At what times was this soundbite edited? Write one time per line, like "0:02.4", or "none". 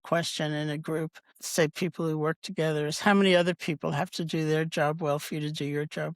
0:01.4

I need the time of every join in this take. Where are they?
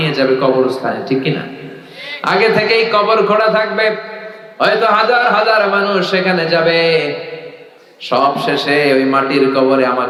none

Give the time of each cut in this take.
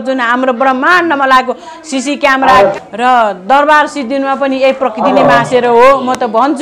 0:02.7

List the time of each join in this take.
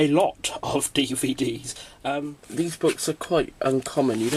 0:02.2

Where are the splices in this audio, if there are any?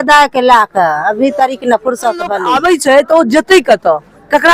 0:02.4

